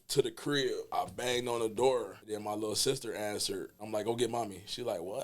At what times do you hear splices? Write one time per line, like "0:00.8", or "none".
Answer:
0:00.9
0:02.2
0:03.8